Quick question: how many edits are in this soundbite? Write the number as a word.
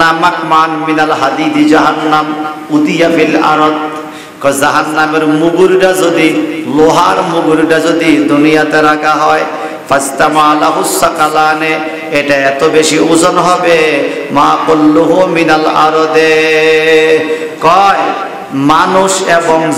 zero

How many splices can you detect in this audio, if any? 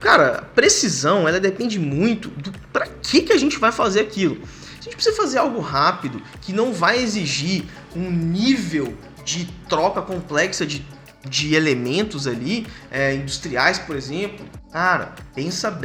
zero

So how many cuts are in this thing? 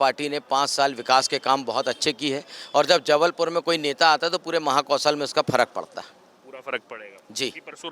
zero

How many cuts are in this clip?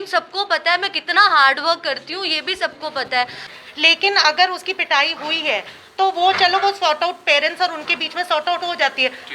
one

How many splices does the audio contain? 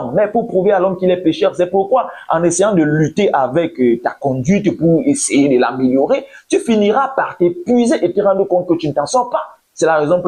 one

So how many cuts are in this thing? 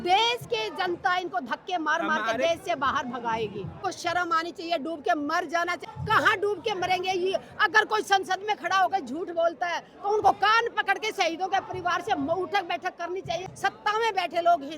three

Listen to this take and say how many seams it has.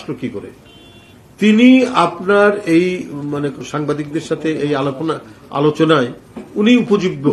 one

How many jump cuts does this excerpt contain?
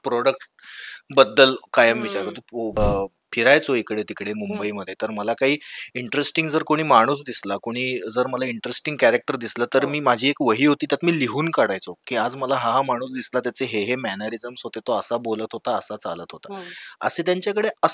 one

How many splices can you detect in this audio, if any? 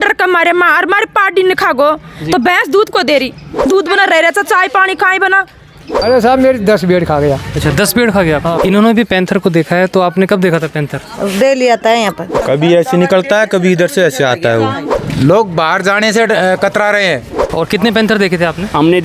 six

